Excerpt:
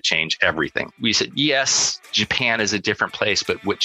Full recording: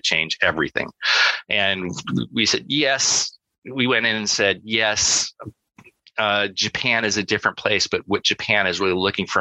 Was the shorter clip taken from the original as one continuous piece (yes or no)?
no